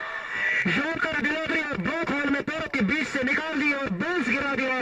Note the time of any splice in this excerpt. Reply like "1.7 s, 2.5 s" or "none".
none